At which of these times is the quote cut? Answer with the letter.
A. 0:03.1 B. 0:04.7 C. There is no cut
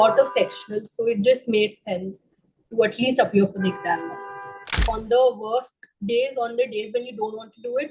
B